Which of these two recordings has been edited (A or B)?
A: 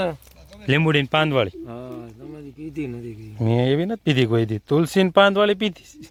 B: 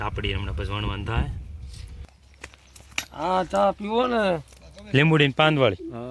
B